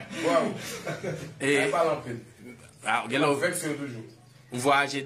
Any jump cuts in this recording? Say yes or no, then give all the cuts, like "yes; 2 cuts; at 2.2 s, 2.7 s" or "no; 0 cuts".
no; 0 cuts